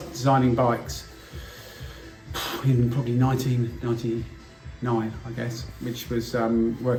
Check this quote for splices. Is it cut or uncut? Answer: uncut